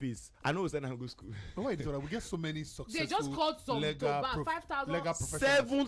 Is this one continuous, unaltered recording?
yes; 0 cuts

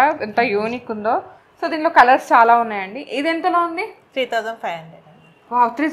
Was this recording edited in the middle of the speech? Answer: no; 0 cuts

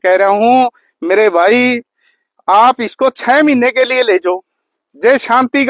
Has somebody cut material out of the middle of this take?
no; 0 cuts

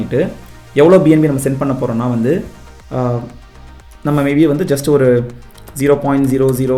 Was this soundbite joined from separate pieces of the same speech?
no; 0 cuts

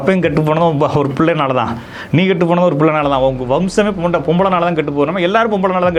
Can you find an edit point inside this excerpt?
no; 0 cuts

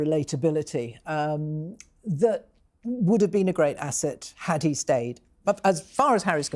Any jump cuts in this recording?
no; 0 cuts

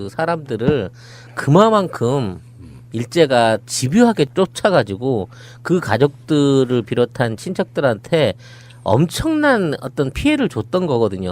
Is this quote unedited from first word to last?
no; 1 cut; at 8.7 s

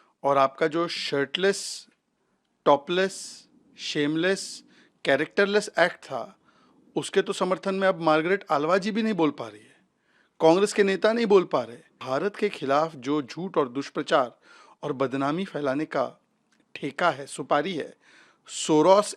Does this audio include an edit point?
yes; 1 cut; at 12.0 s

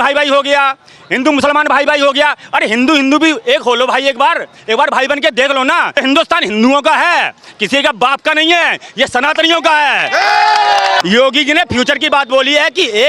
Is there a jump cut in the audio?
yes; 2 cuts; at 5.9 s, 11.0 s

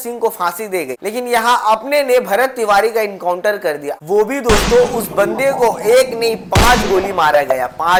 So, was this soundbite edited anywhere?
no; 0 cuts

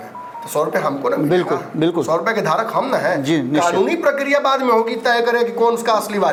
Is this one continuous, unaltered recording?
yes; 0 cuts

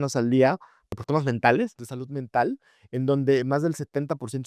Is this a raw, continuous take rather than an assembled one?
no; 1 cut; at 0.9 s

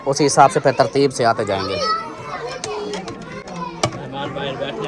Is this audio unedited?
yes; 0 cuts

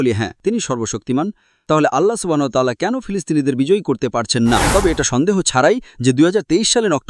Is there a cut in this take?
yes; 1 cut; at 4.6 s

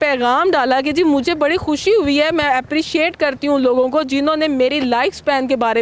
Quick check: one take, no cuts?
yes; 0 cuts

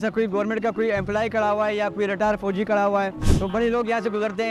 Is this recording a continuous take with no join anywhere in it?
no; 1 cut; at 3.2 s

